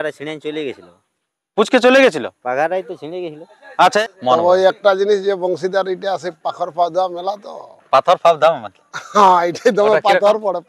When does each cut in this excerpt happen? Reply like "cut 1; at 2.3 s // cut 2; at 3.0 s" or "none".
cut 1; at 4.0 s